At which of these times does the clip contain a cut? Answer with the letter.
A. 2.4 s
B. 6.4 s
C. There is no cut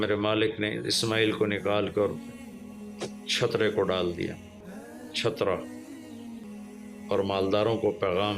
B